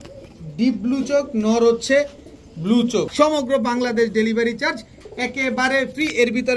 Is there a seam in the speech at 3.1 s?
yes; 1 cut; at 3.1 s

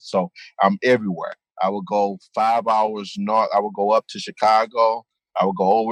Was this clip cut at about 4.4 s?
no; 0 cuts

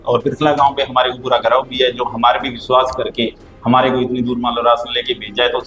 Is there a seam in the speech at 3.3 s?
no; 0 cuts

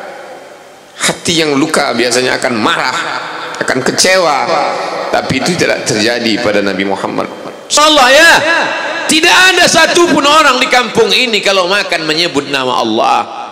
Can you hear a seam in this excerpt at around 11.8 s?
no; 1 cut; at 7.8 s

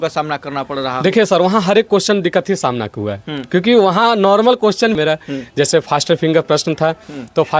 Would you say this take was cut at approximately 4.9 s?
yes; 1 cut; at 4.9 s

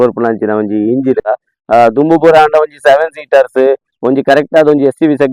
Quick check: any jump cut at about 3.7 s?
no; 1 cut; at 1.6 s

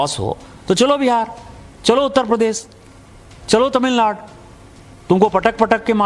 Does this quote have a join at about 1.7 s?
no; 0 cuts

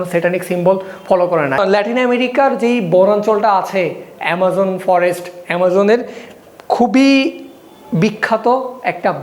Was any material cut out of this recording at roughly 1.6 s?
yes; 1 cut; at 1.6 s

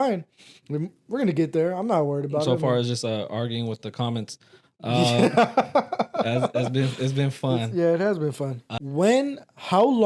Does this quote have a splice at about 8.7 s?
yes; 1 cut; at 8.7 s

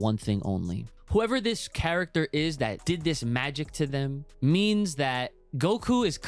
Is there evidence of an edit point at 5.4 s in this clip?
yes; 4 cuts; at 0.9 s, 2.8 s, 4.2 s, 5.4 s

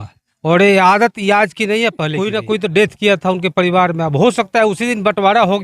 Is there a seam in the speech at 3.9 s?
no; 1 cut; at 2.3 s

